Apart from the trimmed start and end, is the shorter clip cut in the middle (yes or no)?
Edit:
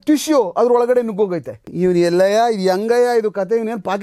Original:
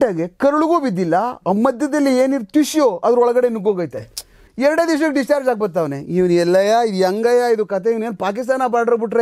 yes